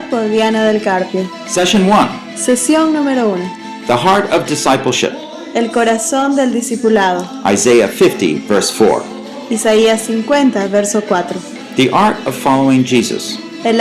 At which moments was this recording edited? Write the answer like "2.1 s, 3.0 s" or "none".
1.4 s